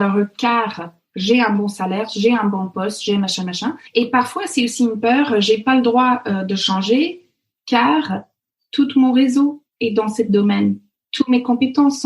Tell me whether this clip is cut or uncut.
cut